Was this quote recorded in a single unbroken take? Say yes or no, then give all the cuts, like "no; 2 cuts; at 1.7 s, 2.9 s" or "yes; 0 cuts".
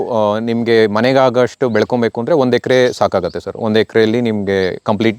yes; 0 cuts